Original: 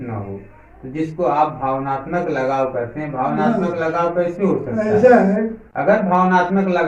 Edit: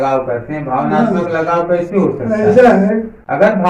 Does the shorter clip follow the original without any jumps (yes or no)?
yes